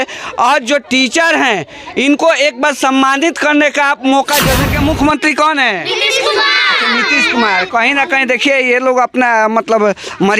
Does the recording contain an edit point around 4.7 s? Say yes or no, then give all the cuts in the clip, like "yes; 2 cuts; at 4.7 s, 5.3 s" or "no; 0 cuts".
yes; 1 cut; at 4.7 s